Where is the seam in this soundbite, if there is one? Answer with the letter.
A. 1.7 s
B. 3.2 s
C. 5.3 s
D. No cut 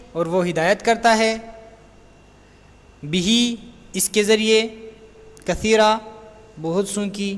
B